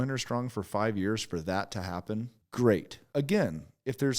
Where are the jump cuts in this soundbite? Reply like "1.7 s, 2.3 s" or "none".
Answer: 2.4 s, 3.0 s